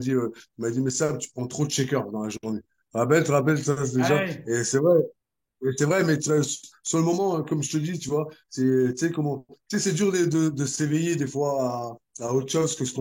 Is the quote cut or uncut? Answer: uncut